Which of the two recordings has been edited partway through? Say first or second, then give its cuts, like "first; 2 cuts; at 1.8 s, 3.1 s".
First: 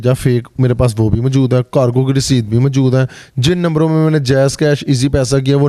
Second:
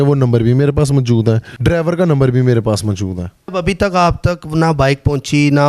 second; 2 cuts; at 1.5 s, 3.4 s